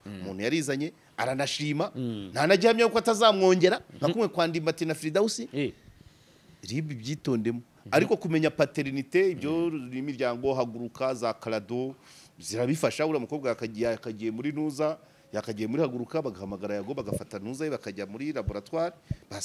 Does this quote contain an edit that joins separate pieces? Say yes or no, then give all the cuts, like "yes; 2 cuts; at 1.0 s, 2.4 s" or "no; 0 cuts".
no; 0 cuts